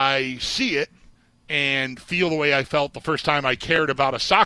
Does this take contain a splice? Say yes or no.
no